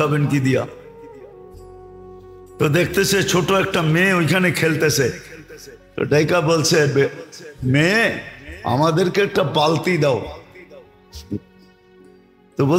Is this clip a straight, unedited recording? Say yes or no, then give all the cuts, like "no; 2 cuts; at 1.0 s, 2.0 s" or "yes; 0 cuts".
yes; 0 cuts